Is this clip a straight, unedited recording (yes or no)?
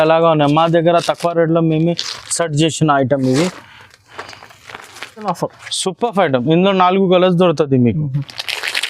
no